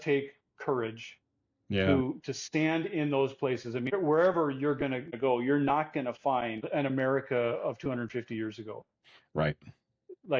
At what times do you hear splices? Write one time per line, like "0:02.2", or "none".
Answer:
0:03.9
0:05.1
0:06.7